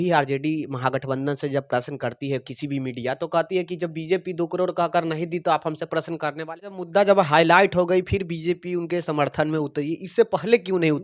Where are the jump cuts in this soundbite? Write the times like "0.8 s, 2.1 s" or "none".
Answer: 6.7 s